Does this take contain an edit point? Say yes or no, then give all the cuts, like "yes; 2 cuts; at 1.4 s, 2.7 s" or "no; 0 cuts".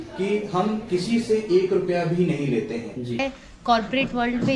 yes; 1 cut; at 3.2 s